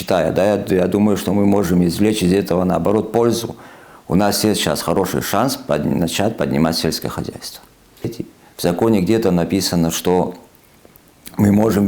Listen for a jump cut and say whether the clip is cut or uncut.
cut